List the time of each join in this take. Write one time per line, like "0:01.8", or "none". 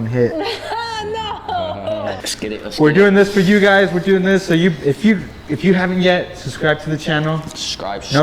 0:02.2